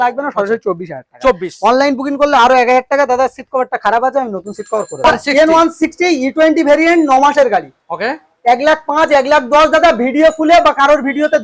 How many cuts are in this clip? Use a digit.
1